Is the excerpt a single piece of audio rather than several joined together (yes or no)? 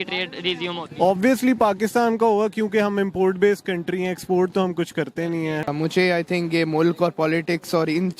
no